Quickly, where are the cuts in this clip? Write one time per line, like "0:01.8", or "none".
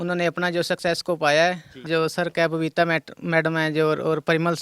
0:01.8